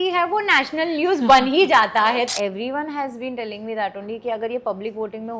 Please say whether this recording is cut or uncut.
cut